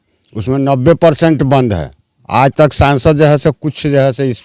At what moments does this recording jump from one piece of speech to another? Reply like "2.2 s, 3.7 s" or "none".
none